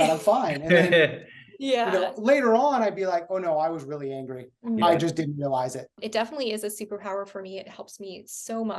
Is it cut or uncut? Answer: cut